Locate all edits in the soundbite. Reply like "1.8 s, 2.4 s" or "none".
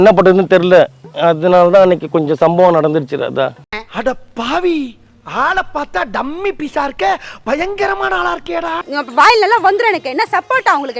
8.8 s